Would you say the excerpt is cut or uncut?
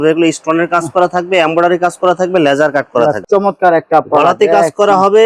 cut